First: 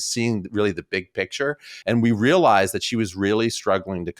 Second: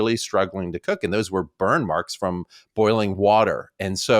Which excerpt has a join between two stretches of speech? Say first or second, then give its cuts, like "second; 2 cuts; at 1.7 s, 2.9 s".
first; 1 cut; at 1.7 s